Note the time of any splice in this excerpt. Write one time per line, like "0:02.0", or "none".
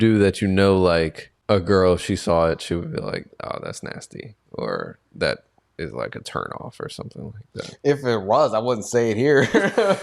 0:01.3